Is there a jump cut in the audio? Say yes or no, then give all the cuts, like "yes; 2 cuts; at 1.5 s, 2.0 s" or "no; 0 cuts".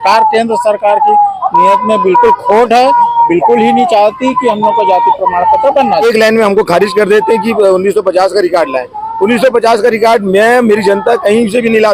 yes; 1 cut; at 6.0 s